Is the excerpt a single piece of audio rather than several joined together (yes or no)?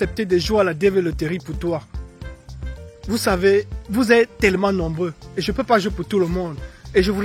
yes